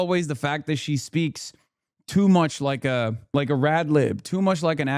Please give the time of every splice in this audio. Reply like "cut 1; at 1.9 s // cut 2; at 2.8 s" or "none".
cut 1; at 3.2 s